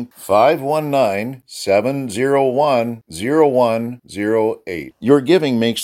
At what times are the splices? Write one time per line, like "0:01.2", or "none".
none